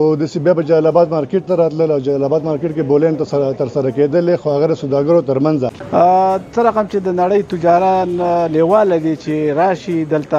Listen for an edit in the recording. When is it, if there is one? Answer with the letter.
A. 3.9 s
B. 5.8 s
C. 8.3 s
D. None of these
B